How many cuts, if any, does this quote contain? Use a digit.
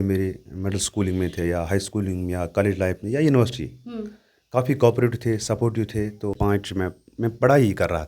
1